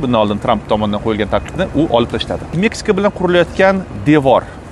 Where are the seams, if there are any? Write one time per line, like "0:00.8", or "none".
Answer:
none